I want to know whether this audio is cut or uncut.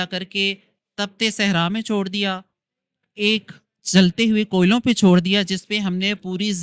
uncut